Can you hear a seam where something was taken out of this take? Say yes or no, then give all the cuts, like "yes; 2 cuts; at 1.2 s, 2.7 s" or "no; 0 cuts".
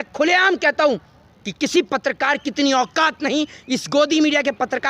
no; 0 cuts